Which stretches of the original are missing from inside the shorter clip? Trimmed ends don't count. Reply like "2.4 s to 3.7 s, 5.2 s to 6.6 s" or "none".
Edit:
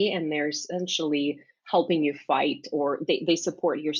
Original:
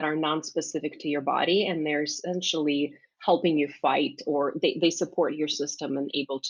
none